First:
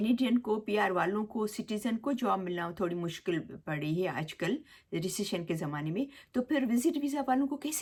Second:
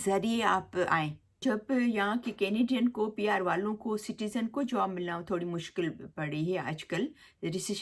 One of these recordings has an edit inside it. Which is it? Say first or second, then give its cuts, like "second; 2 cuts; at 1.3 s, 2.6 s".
second; 1 cut; at 1.2 s